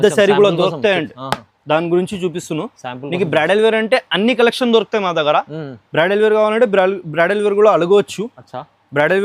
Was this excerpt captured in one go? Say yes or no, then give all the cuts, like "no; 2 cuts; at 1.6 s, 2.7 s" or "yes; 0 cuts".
yes; 0 cuts